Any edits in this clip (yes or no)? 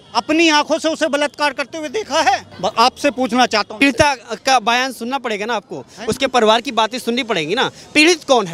no